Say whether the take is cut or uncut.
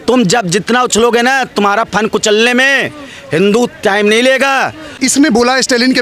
uncut